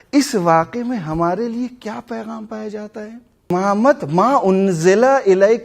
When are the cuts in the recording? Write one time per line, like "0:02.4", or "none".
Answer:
0:03.5